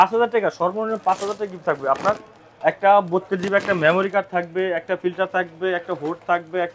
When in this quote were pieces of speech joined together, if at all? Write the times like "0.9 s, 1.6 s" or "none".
none